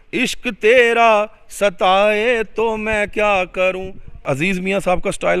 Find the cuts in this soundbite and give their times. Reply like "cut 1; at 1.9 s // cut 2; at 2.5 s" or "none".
cut 1; at 4.3 s